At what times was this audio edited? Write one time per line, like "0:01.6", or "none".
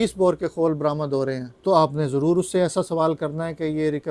0:01.5